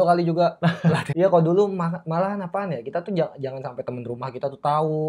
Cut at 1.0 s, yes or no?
yes